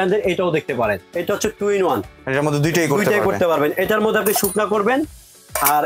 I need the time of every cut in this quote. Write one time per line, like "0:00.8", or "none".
0:01.1